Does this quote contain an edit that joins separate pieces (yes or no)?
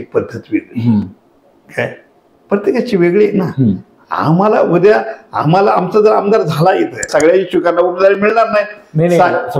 yes